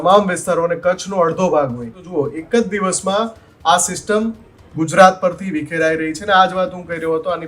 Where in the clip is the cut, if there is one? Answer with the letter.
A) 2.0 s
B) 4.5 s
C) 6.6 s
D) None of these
A